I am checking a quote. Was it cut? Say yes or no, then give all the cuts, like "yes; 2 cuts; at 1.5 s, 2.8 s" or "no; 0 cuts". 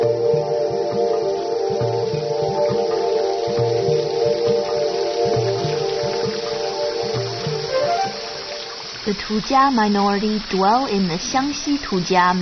no; 0 cuts